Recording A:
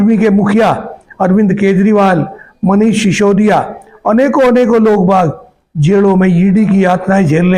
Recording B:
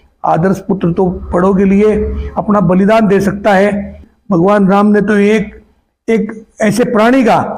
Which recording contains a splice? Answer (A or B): B